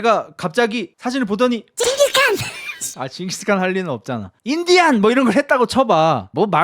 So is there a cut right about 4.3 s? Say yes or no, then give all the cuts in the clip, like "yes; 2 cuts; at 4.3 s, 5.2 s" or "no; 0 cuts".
yes; 1 cut; at 4.3 s